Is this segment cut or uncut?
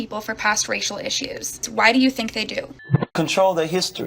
cut